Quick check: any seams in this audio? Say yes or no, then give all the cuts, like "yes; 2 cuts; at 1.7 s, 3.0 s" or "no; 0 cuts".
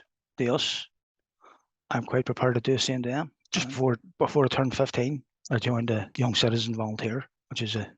yes; 2 cuts; at 3.4 s, 6.1 s